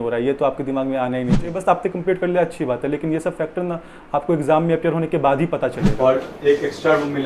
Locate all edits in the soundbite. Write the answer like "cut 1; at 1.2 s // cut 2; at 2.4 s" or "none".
cut 1; at 1.6 s // cut 2; at 5.8 s